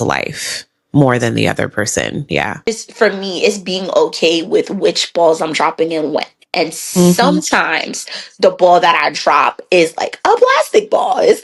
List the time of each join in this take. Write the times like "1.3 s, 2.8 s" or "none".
2.7 s